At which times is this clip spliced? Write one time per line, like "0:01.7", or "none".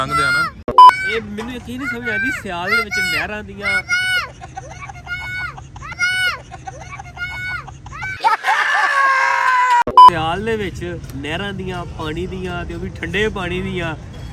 none

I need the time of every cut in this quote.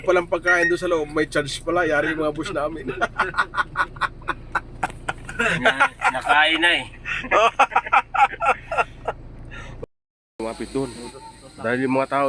0:09.8

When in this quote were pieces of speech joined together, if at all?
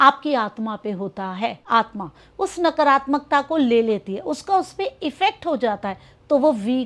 0:01.6

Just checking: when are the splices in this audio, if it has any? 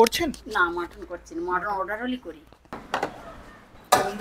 0:02.8

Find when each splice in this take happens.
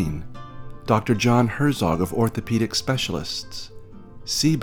none

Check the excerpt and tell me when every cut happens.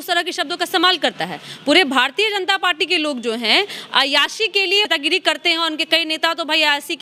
0:04.9

